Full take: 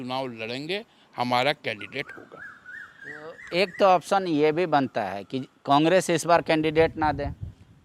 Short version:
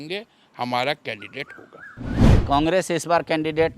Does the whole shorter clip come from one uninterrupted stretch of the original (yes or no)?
no